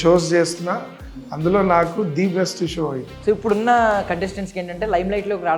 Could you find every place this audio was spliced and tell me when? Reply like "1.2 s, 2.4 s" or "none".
3.1 s